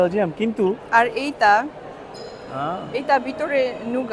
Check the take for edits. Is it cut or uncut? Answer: uncut